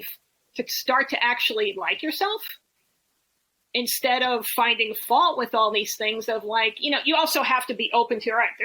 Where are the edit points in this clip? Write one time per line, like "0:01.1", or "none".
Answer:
none

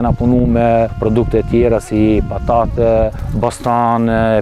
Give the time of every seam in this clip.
0:00.9
0:03.2

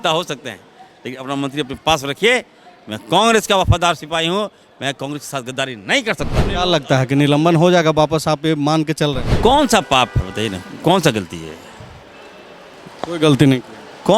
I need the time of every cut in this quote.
0:06.5
0:09.3

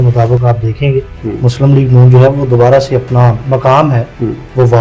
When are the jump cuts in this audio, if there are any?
0:01.1
0:03.4

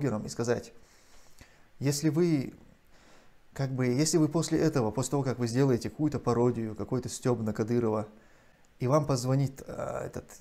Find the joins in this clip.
none

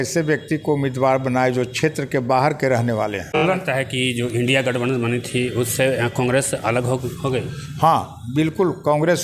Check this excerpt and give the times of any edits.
0:03.4

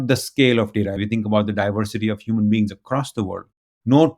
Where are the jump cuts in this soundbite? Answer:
0:01.0

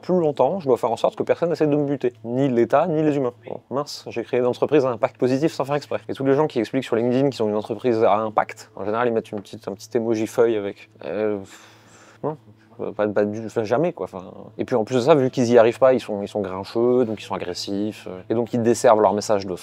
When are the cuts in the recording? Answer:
none

